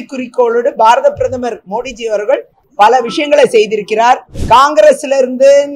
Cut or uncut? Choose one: cut